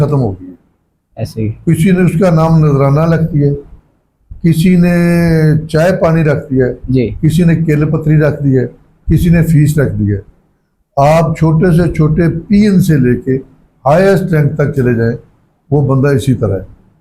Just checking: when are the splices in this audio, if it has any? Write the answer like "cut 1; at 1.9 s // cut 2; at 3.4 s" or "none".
none